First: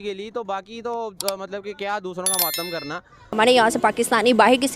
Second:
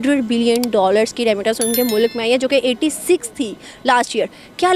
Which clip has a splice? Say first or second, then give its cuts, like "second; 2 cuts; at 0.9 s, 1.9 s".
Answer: first; 1 cut; at 3.3 s